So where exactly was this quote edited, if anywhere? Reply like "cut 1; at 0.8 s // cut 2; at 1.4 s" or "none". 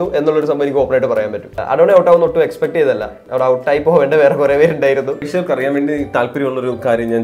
cut 1; at 1.5 s // cut 2; at 3.2 s // cut 3; at 5.3 s